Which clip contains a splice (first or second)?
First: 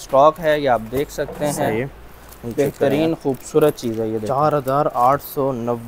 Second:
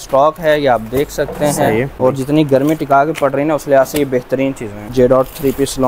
second